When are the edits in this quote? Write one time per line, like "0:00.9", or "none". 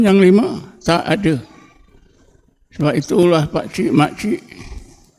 none